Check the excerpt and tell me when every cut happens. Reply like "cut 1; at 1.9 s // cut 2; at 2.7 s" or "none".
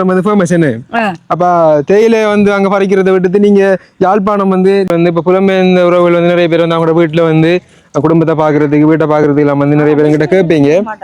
cut 1; at 4.9 s